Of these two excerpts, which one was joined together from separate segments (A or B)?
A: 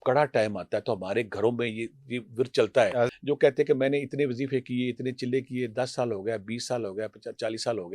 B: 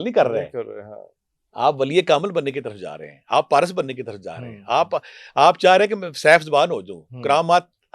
A